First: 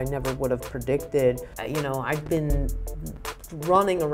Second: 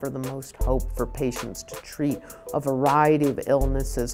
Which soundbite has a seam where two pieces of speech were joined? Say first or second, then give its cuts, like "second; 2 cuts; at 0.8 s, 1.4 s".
first; 1 cut; at 1.5 s